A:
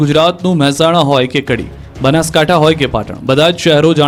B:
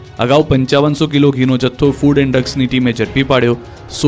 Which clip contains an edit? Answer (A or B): B